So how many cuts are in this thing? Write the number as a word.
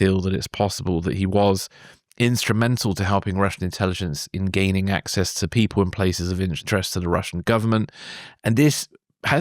one